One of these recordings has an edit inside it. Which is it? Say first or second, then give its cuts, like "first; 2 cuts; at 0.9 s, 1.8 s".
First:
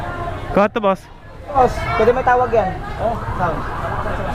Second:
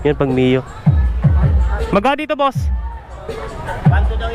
first; 1 cut; at 1.6 s